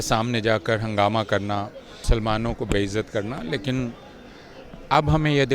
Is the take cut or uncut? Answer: cut